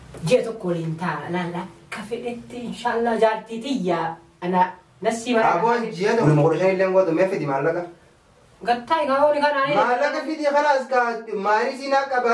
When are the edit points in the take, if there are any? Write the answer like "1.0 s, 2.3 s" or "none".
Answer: 6.3 s

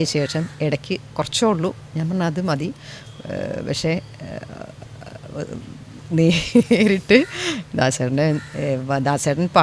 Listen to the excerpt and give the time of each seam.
none

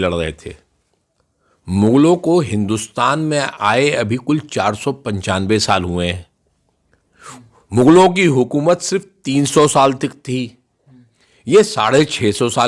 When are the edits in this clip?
none

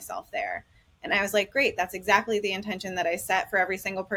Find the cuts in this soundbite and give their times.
none

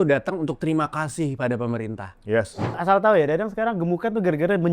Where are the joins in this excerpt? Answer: 2.7 s

